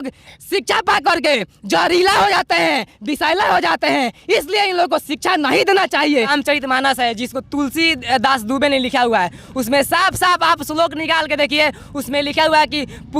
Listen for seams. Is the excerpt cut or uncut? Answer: cut